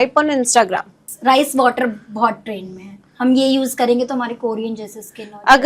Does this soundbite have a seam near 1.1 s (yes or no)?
yes